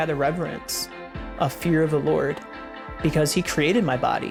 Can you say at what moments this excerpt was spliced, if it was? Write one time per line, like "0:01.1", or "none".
none